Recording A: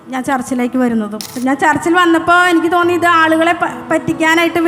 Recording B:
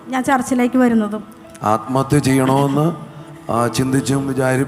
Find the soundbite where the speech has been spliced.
A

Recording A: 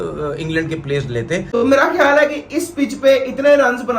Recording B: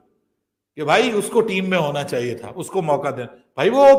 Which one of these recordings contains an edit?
A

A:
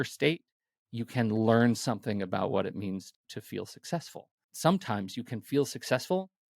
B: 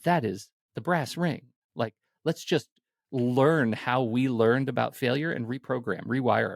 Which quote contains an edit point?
A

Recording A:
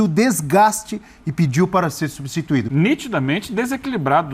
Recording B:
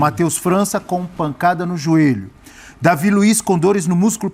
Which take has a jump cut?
A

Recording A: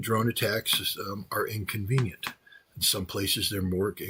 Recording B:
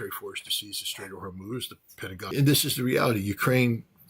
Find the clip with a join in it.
B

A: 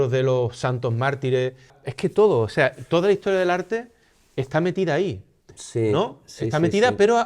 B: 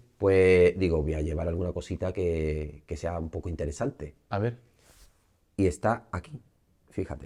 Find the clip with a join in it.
A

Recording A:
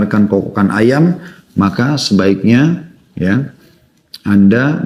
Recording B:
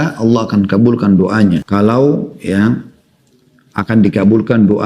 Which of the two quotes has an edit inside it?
B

